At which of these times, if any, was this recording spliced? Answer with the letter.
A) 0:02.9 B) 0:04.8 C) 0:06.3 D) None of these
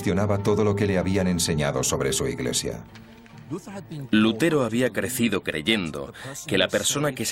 D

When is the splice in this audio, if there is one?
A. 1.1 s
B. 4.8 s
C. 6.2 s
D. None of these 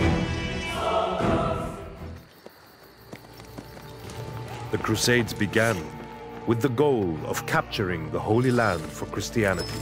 A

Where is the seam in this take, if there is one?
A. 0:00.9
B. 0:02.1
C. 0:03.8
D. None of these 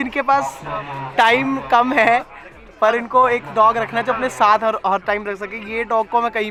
D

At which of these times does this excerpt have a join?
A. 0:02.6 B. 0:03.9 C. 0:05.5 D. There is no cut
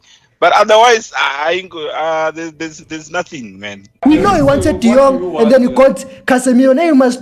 B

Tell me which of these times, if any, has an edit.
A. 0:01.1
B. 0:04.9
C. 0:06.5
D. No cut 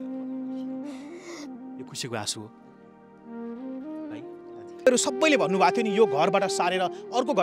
B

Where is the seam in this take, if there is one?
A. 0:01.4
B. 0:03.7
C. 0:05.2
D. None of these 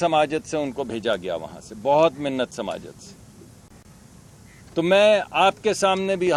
D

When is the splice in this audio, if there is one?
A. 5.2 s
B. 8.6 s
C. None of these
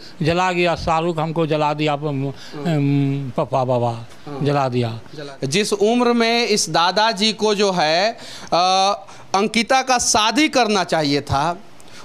A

